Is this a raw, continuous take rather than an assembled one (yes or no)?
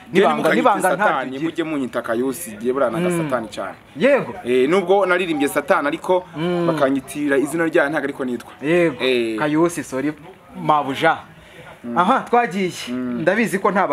yes